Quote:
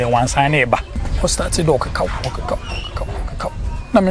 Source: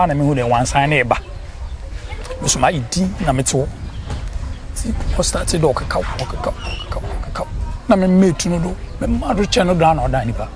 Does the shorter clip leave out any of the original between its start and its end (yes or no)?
yes